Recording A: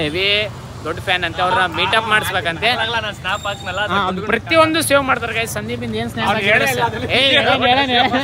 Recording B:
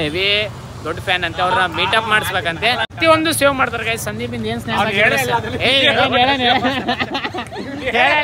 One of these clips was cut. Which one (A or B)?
B